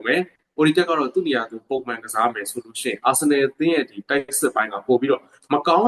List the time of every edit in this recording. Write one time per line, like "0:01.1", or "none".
none